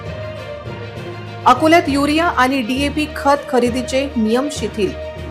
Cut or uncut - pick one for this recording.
cut